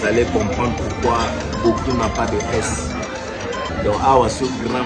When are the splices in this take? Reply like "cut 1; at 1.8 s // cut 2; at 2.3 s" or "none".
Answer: cut 1; at 3.7 s